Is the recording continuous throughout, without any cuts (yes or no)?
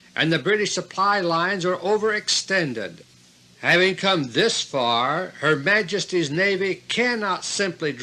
yes